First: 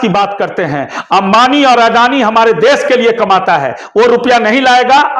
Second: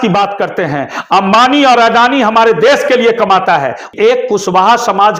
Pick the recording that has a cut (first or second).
second